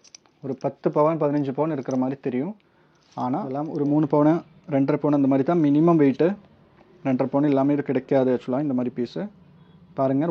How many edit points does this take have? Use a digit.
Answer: 1